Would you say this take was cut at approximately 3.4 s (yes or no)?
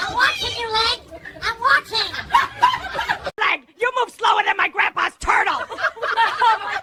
no